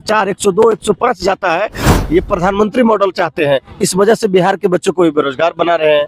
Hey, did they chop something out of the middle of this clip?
yes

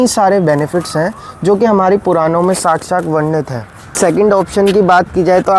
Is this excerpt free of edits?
no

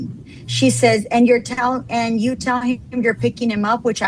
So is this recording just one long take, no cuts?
yes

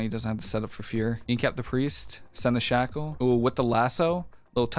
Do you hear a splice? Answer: yes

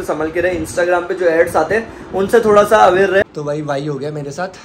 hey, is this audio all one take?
no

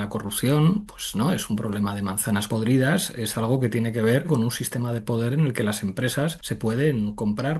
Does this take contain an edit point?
yes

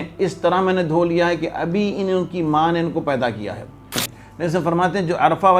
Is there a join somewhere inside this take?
yes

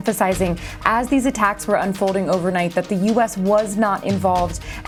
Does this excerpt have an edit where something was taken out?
no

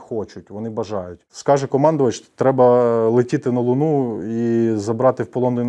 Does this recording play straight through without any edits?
no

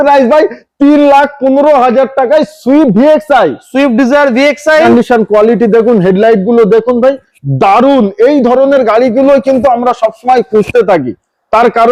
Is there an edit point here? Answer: no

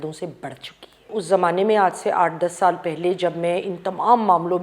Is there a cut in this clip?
yes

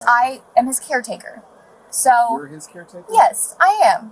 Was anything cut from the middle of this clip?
no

